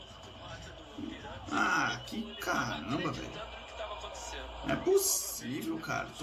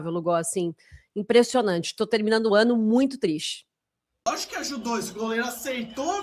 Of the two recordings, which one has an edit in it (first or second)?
second